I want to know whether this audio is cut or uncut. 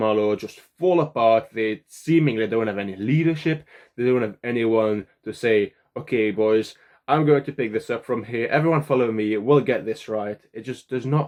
uncut